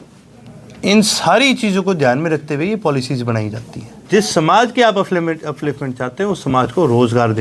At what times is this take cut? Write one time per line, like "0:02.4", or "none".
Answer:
0:04.0